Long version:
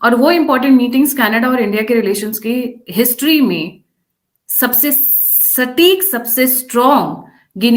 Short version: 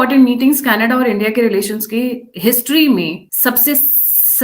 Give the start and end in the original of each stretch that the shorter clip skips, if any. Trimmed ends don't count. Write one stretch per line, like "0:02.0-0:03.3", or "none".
0:03.8-0:04.4

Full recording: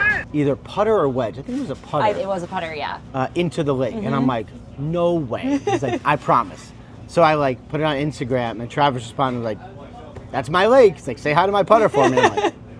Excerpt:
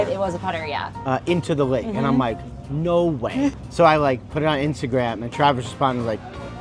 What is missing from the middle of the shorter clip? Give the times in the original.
0:05.6-0:06.9

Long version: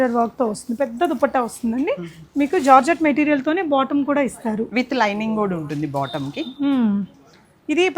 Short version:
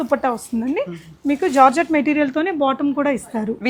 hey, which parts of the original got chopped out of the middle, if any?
none

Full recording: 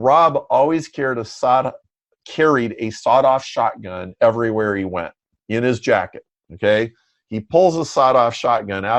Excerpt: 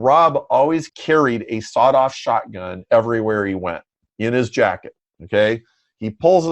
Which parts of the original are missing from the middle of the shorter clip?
0:00.9-0:02.2

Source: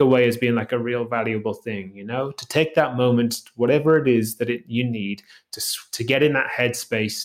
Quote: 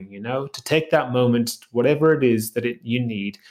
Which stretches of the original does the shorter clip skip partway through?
none

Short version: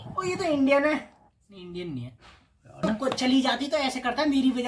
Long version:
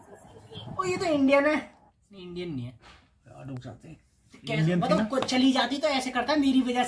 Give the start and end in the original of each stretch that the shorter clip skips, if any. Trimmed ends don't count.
0:03.4-0:04.9

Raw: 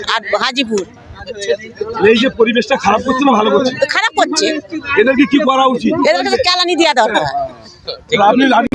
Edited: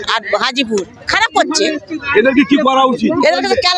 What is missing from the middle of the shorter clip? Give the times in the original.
0:01.1-0:03.9

